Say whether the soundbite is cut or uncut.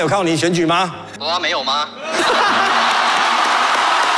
cut